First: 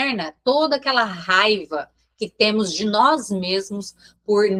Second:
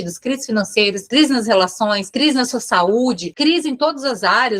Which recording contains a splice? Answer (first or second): second